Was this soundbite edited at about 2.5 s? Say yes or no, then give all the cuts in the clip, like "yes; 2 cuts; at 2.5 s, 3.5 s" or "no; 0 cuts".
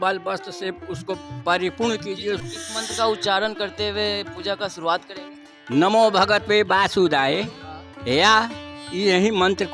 yes; 1 cut; at 2.5 s